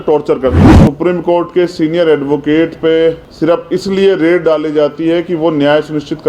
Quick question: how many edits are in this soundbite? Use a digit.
2